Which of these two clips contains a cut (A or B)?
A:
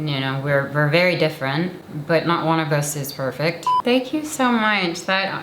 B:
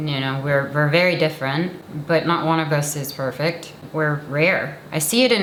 A